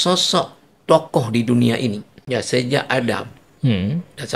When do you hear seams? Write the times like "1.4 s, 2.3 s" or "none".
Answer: 2.1 s